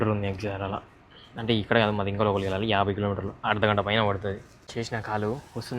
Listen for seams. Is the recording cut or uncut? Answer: cut